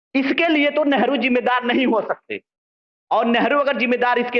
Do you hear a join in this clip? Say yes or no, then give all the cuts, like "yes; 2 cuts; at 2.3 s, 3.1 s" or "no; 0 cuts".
no; 0 cuts